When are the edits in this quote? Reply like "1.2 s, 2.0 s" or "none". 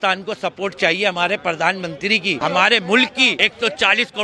2.4 s, 3.4 s